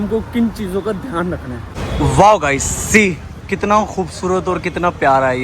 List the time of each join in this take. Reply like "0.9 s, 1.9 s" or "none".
1.6 s